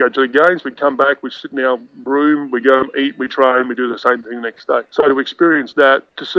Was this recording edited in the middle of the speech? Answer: no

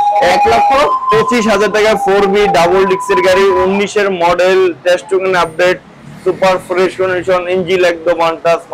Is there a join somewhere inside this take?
no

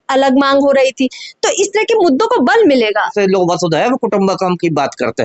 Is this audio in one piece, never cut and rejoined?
no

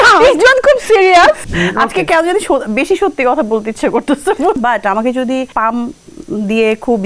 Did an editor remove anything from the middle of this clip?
yes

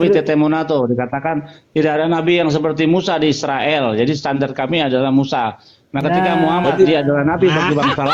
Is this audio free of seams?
yes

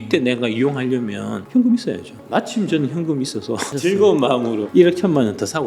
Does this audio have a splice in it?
yes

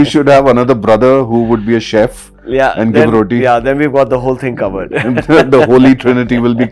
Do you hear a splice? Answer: no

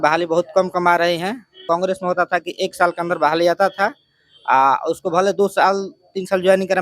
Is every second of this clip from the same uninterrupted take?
no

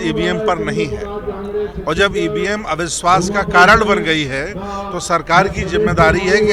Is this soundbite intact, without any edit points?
yes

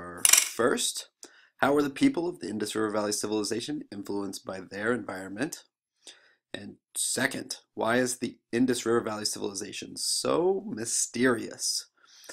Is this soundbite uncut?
no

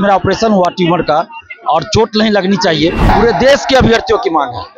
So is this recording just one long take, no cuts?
no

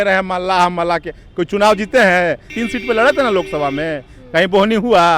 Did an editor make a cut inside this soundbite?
yes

